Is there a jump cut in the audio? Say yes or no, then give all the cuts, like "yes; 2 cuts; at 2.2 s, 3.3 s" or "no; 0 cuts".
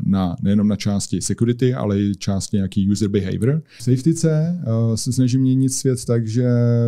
yes; 1 cut; at 3.7 s